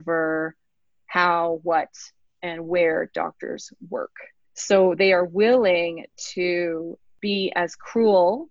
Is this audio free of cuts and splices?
no; 1 cut; at 7.1 s

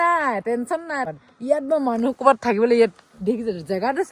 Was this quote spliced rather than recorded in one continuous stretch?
yes; 1 cut; at 1.0 s

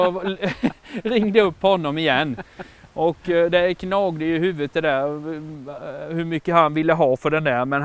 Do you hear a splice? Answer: no; 0 cuts

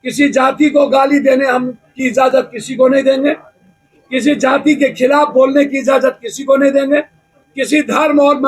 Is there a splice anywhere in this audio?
no; 0 cuts

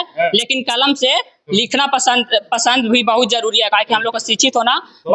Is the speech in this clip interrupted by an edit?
no; 0 cuts

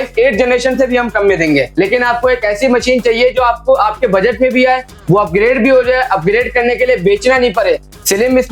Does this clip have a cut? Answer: yes; 1 cut; at 1.7 s

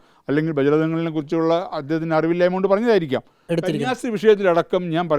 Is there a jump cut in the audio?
yes; 1 cut; at 3.4 s

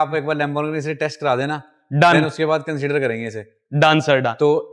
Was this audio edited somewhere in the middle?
no; 0 cuts

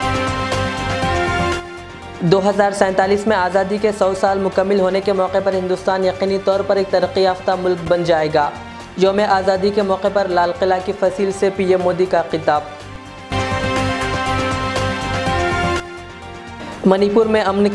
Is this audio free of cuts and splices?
no; 1 cut; at 1.4 s

